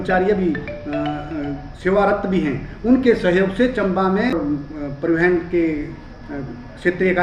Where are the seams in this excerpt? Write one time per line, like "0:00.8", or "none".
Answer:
0:04.3

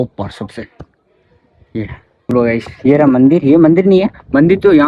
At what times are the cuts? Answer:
0:02.3

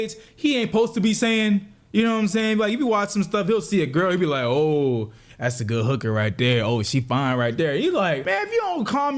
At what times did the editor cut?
0:08.2

